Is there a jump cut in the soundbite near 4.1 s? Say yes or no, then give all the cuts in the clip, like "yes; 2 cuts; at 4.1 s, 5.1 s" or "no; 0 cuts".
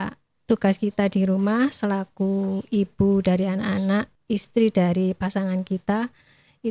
yes; 1 cut; at 4.1 s